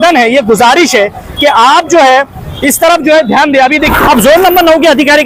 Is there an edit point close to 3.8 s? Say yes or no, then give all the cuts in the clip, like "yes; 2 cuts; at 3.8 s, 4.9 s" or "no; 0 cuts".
yes; 1 cut; at 3.8 s